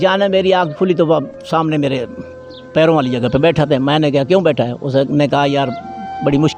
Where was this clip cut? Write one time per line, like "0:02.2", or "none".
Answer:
none